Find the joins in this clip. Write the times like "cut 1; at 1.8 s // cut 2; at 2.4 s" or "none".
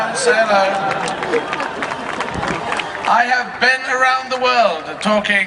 none